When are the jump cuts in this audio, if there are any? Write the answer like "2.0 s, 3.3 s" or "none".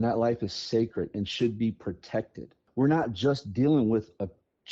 2.6 s